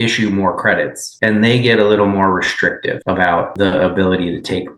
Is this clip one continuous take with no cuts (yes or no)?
no